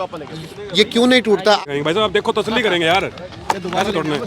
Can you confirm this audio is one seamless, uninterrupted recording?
no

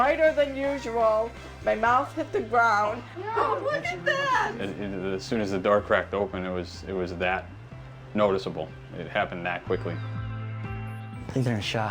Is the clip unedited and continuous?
yes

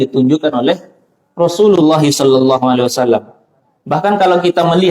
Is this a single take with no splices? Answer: yes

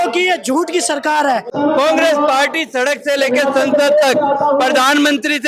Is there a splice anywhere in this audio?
yes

